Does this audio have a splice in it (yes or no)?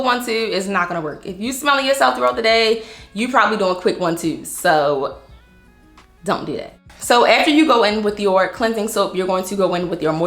no